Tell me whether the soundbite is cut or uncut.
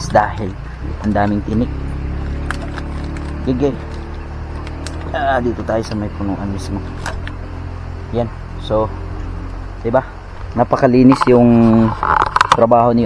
uncut